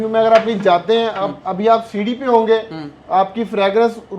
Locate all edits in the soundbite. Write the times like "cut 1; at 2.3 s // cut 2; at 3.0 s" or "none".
none